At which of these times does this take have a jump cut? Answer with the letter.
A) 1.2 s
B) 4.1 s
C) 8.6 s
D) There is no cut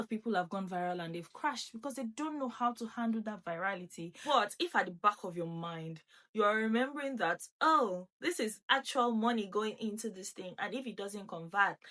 B